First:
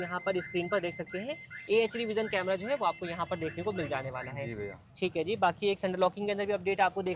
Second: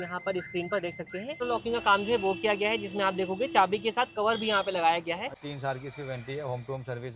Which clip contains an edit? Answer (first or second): second